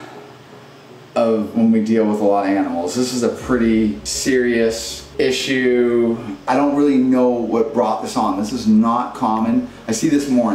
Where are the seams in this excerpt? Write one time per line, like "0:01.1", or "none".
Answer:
0:04.1
0:05.0
0:06.4